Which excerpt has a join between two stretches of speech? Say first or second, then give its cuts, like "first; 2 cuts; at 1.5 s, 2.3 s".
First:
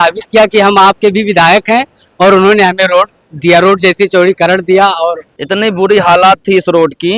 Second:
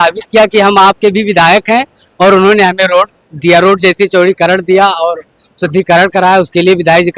first; 1 cut; at 5.3 s